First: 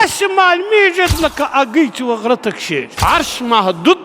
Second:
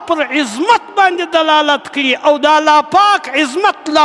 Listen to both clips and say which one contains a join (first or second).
first